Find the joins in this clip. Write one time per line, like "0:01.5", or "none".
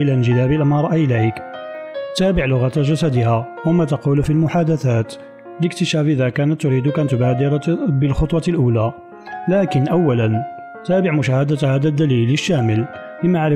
none